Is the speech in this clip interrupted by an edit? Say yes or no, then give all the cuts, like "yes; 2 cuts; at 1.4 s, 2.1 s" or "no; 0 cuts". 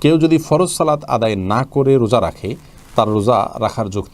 no; 0 cuts